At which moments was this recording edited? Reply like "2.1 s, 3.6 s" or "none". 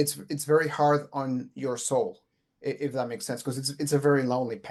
none

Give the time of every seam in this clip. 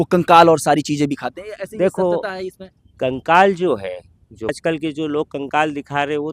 4.5 s

